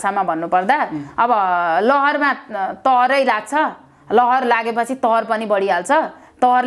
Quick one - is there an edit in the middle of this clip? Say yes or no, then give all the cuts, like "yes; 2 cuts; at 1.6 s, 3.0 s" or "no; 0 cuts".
no; 0 cuts